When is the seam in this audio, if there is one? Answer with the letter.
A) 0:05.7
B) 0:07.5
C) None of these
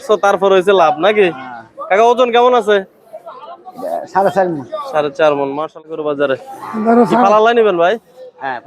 A